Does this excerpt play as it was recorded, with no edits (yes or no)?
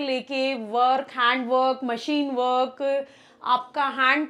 yes